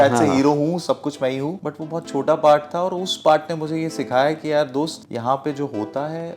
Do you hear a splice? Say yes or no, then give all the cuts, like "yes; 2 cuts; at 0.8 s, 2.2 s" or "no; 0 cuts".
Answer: yes; 2 cuts; at 1.6 s, 5.0 s